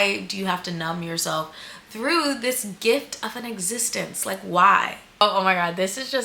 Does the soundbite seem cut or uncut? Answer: cut